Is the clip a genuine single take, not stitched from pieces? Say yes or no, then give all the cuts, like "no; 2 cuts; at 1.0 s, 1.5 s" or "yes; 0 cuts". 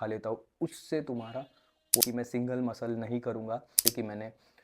no; 2 cuts; at 2.0 s, 3.8 s